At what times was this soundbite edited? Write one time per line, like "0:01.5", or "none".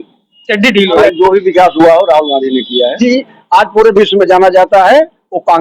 0:01.0
0:03.0